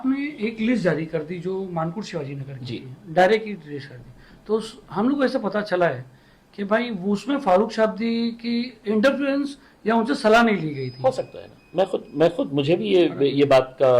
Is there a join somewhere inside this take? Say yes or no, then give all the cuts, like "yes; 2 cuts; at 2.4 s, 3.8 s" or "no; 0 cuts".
no; 0 cuts